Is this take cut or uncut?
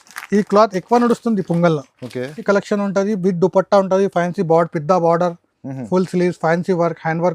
cut